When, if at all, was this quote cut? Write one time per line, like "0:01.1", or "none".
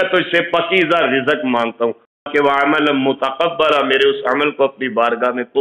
0:02.2